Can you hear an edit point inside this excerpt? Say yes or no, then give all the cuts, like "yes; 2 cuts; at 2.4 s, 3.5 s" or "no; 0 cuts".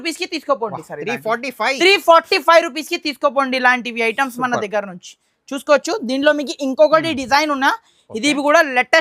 no; 0 cuts